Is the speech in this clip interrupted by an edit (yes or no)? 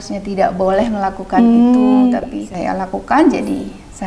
no